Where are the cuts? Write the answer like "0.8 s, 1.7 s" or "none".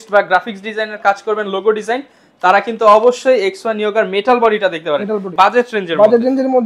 5.3 s